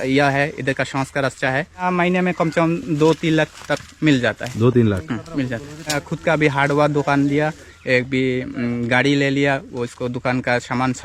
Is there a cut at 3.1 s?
no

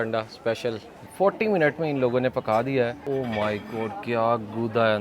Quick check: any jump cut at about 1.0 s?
yes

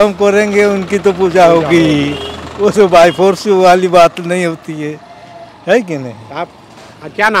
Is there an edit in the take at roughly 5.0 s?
no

